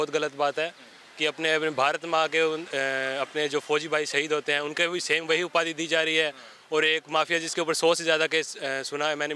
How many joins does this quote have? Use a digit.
0